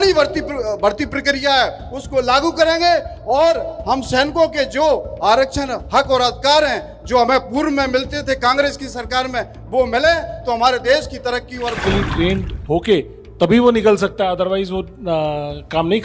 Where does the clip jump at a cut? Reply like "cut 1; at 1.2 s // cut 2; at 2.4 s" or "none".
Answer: cut 1; at 11.8 s